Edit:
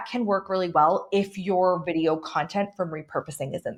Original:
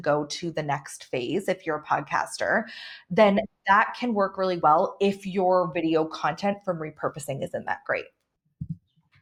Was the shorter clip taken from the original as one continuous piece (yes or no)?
yes